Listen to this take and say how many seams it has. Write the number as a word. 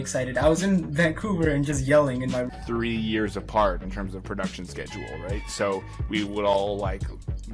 one